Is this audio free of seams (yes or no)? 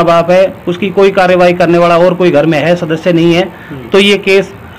yes